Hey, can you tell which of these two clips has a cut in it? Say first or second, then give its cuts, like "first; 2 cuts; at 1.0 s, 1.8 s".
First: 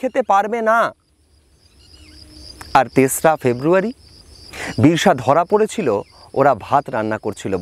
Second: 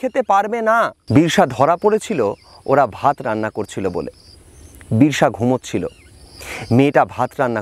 second; 1 cut; at 1.0 s